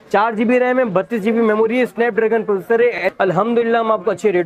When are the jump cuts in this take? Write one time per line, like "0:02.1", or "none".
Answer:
0:03.0